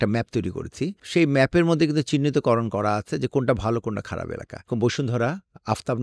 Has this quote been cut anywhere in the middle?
yes; 2 cuts; at 1.0 s, 4.7 s

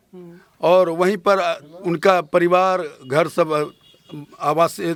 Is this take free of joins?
yes; 0 cuts

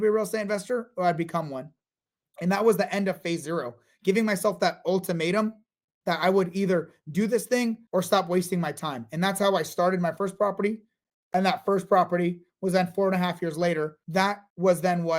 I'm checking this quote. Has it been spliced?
yes; 1 cut; at 14.0 s

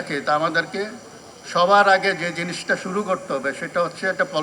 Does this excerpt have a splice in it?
no; 0 cuts

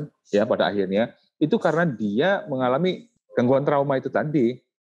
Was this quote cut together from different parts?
yes; 1 cut; at 3.2 s

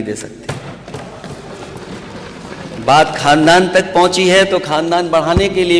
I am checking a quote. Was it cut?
no; 0 cuts

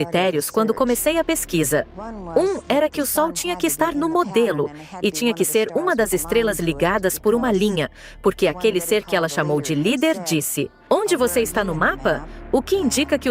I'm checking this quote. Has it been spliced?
no; 0 cuts

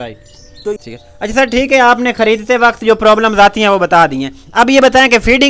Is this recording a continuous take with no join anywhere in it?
yes; 0 cuts

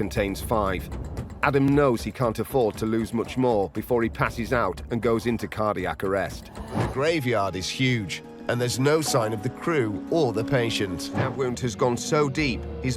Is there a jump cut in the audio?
yes; 2 cuts; at 6.9 s, 11.2 s

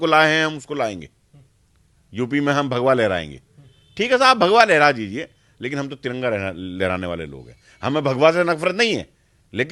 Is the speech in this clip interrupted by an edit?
no; 0 cuts

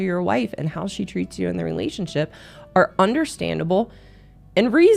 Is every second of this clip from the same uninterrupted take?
yes; 0 cuts

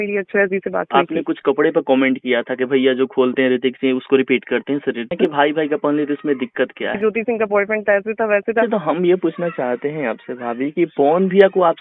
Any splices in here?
yes; 4 cuts; at 0.9 s, 5.1 s, 6.9 s, 8.6 s

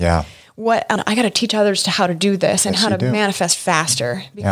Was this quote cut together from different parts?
yes; 1 cut; at 1.0 s

